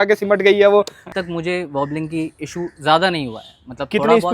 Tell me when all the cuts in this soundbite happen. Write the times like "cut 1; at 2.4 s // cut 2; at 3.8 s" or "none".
cut 1; at 1.0 s